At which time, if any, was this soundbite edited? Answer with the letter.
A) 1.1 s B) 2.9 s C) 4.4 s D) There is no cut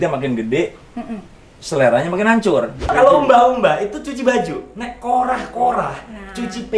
B